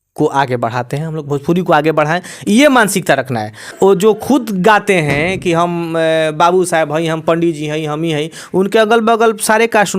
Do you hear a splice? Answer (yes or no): yes